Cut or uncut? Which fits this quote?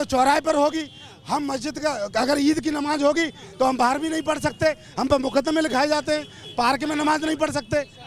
uncut